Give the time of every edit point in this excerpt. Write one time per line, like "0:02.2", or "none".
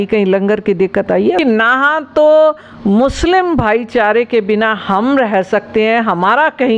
0:01.4